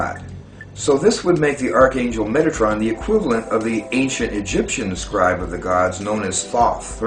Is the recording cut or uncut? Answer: cut